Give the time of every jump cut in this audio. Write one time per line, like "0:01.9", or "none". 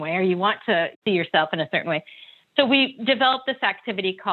0:00.9